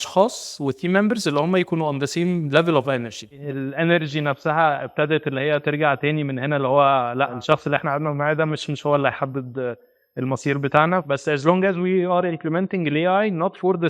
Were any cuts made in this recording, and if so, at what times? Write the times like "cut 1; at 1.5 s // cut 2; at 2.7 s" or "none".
cut 1; at 3.3 s // cut 2; at 7.4 s // cut 3; at 11.0 s